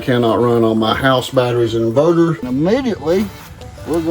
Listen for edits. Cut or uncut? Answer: cut